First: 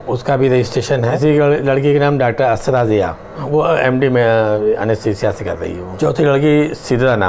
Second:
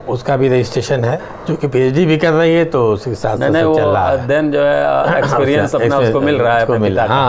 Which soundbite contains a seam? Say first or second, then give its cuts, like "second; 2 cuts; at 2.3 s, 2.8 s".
first; 3 cuts; at 1.2 s, 3.4 s, 5.8 s